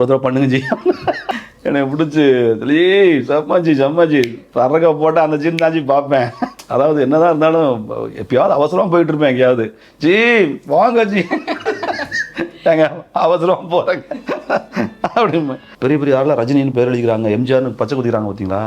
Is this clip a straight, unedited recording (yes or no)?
no